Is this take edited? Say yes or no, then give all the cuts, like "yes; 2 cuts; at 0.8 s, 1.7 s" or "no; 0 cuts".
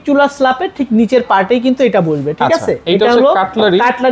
no; 0 cuts